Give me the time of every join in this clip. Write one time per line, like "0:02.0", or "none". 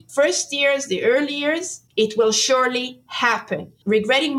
none